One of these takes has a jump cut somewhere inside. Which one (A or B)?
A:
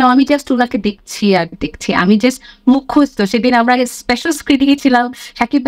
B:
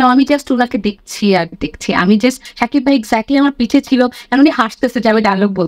B